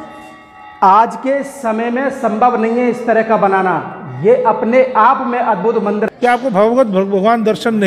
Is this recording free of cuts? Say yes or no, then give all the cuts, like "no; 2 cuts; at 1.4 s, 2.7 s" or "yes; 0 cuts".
no; 1 cut; at 6.1 s